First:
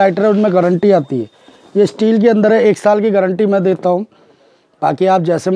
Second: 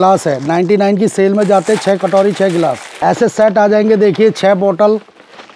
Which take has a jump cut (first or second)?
second